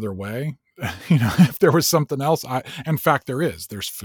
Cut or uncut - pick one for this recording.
uncut